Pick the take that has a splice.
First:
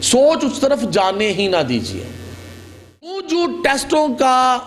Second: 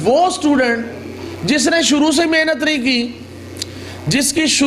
first; 1 cut; at 3.2 s

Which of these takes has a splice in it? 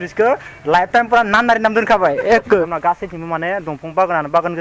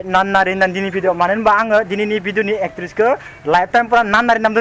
first; 1 cut; at 2.7 s

